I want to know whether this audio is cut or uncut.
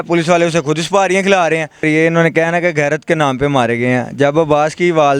cut